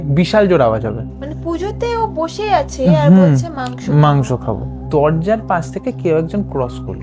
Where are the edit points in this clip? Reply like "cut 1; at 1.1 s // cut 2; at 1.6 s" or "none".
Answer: cut 1; at 1.1 s // cut 2; at 4.8 s